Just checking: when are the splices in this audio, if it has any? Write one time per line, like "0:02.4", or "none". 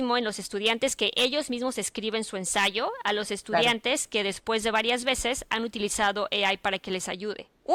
none